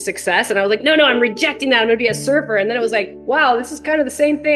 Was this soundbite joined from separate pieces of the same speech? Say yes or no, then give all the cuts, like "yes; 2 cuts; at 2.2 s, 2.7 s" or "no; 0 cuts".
no; 0 cuts